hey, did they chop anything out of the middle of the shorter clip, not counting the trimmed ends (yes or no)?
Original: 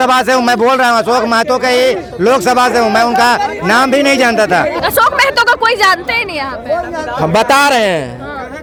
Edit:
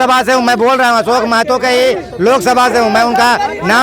no